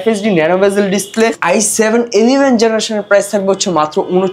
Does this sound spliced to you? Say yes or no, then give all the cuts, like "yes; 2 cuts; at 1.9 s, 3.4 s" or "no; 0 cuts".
yes; 1 cut; at 1.4 s